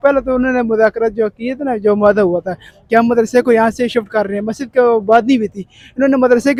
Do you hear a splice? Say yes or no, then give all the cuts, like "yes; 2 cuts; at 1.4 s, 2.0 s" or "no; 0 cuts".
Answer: no; 0 cuts